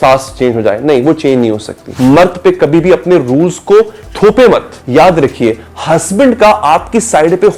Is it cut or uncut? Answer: cut